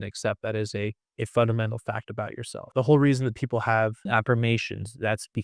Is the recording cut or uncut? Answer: cut